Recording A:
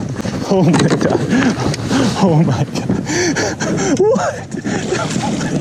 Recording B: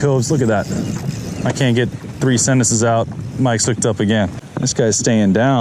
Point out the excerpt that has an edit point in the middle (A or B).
B